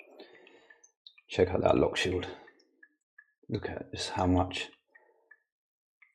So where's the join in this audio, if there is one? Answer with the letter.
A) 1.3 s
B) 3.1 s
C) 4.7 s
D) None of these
D